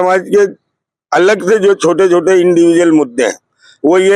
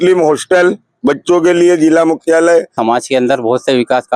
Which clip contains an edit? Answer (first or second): second